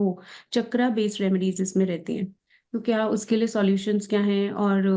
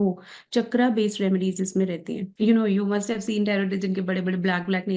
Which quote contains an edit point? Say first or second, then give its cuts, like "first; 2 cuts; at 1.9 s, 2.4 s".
second; 1 cut; at 2.3 s